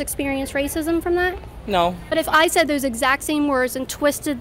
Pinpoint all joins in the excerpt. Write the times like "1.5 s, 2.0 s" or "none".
2.1 s